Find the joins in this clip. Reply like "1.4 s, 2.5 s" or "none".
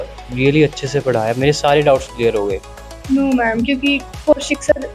2.7 s